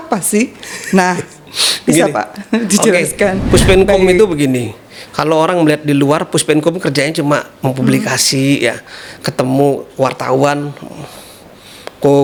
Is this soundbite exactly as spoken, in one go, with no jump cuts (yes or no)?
yes